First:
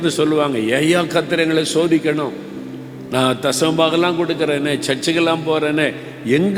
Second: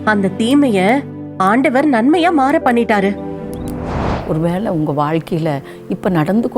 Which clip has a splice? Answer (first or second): second